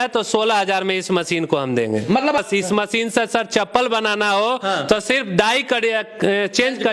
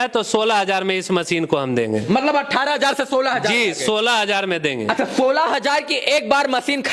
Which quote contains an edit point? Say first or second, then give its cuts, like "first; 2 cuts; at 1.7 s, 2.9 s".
first; 1 cut; at 2.4 s